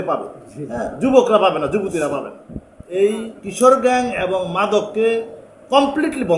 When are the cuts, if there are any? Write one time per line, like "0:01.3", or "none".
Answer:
0:02.4